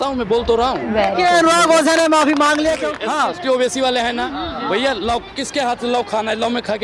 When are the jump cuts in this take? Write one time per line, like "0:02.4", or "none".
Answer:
0:02.9